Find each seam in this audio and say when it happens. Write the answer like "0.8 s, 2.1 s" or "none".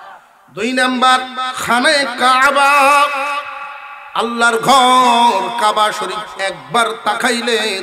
none